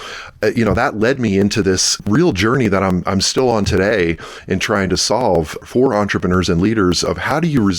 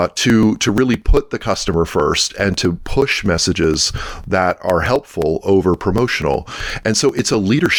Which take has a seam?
first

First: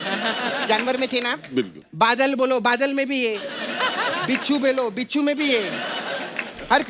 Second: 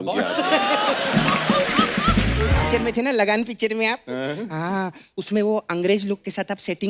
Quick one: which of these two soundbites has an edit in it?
second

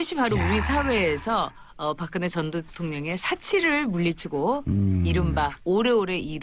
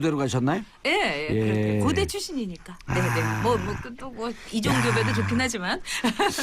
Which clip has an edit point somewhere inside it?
first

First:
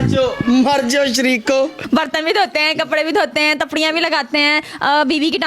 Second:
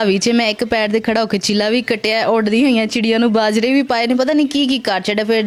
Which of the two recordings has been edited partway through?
first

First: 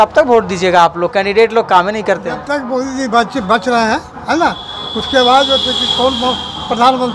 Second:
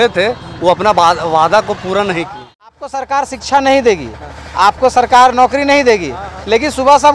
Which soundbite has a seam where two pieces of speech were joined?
second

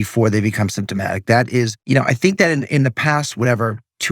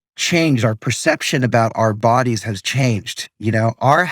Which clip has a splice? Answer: first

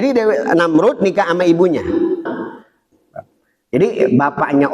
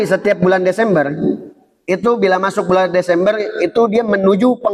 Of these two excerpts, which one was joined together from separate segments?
first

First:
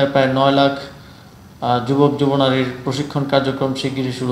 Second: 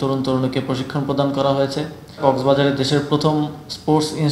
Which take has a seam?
second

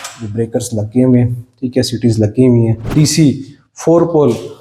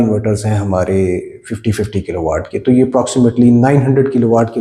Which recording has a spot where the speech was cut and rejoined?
first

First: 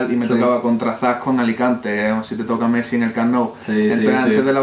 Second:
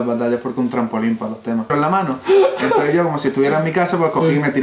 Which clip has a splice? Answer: second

